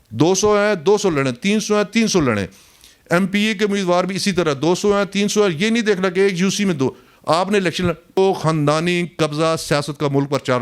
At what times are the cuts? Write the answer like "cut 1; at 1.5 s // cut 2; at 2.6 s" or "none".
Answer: cut 1; at 8.2 s